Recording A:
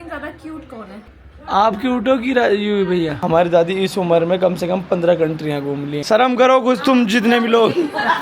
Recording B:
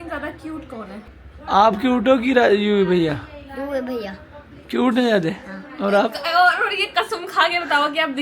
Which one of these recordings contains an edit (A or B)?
A